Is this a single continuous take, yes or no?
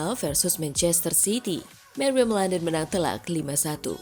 yes